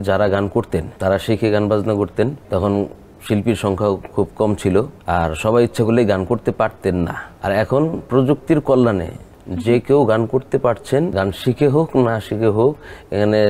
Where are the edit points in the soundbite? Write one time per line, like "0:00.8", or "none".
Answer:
0:00.9
0:02.4
0:05.0
0:07.3
0:11.1